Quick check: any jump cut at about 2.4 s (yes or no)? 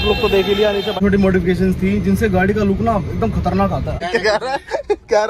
no